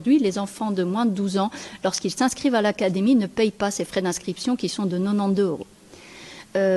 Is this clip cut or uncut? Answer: uncut